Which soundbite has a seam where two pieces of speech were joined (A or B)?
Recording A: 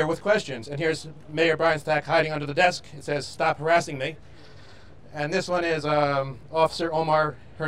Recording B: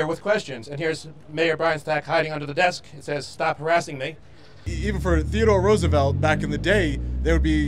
B